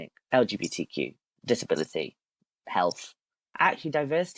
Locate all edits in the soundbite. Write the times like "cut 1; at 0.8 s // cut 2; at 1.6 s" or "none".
cut 1; at 3.4 s